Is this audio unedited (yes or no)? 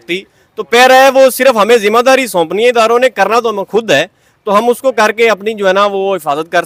yes